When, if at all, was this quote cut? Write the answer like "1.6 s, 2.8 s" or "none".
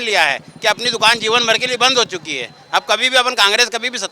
none